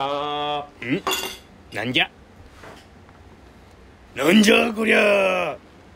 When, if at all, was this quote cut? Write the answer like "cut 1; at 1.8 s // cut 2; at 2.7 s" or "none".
cut 1; at 3.7 s